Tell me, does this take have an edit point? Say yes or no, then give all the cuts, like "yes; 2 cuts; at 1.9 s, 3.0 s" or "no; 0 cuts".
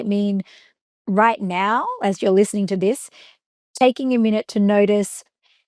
no; 0 cuts